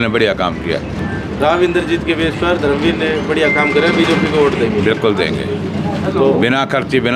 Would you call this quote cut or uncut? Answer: uncut